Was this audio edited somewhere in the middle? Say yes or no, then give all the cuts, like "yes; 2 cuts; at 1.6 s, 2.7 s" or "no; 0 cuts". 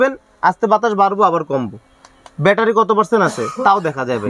no; 0 cuts